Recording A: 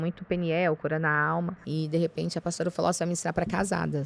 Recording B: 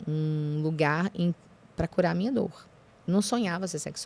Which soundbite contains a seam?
A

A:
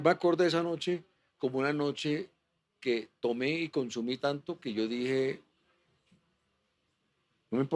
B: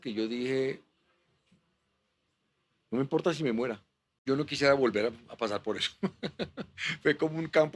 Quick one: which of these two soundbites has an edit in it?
B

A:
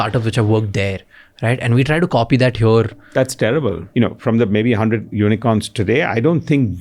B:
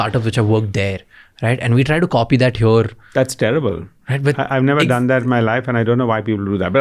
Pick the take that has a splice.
A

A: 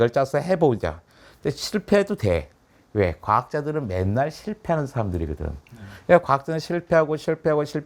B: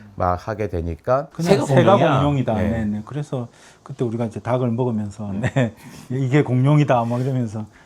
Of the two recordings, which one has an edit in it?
B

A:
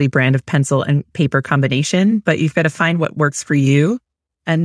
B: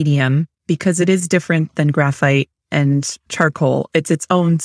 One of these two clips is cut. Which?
B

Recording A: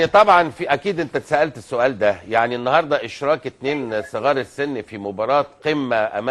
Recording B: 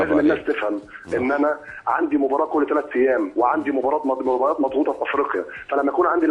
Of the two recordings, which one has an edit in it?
B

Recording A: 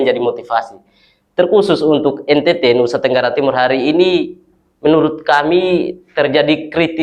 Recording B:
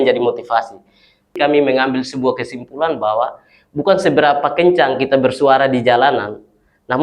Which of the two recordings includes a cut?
B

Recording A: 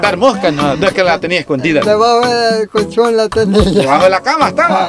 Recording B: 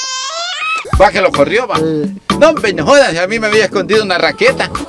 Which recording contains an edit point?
B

